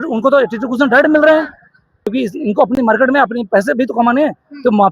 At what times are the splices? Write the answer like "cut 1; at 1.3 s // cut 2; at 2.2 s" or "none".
cut 1; at 2.0 s

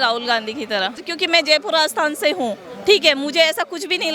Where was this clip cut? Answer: cut 1; at 1.1 s

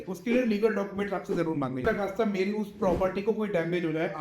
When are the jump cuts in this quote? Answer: cut 1; at 1.8 s

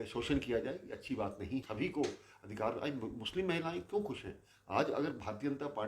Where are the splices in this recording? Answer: cut 1; at 1.7 s

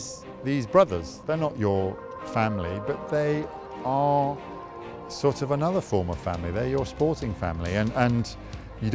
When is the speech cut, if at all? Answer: none

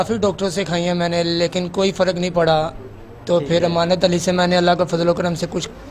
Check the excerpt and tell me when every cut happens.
none

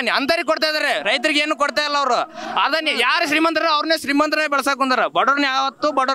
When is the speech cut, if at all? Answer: none

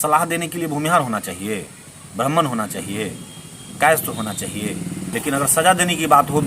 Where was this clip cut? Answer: cut 1; at 5.0 s

